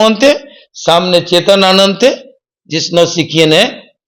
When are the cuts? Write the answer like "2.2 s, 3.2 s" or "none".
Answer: none